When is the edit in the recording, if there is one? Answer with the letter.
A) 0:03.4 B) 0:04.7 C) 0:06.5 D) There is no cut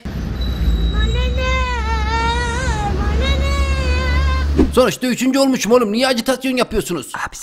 B